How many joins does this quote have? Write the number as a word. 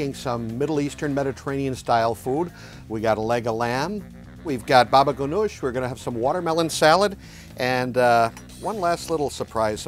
two